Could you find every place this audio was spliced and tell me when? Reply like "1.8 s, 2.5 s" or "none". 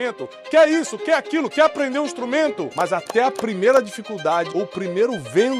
2.7 s, 4.5 s